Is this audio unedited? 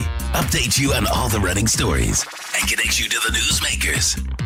yes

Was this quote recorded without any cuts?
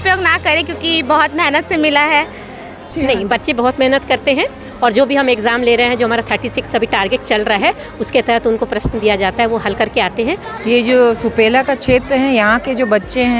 no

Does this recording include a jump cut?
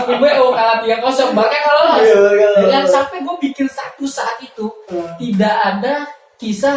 no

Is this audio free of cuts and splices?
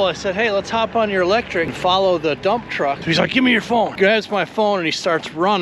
no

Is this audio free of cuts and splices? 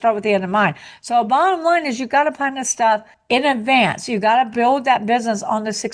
no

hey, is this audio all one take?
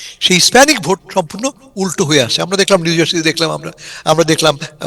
yes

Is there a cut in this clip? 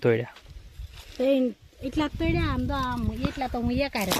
no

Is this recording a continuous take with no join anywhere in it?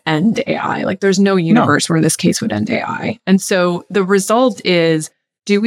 yes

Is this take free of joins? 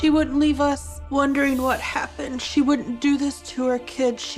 no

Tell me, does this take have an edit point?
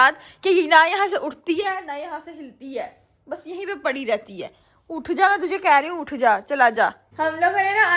no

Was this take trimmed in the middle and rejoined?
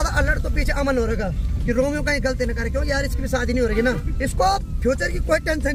no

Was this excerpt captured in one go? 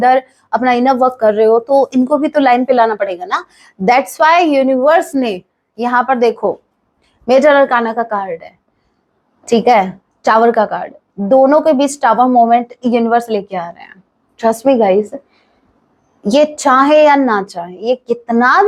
yes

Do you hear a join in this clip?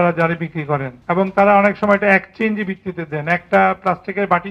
yes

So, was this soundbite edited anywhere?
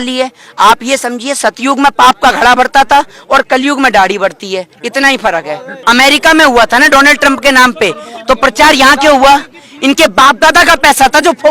yes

